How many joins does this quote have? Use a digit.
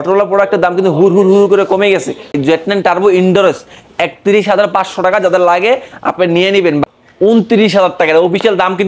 2